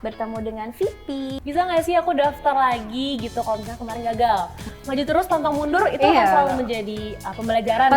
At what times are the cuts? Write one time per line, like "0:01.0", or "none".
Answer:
0:01.4
0:04.7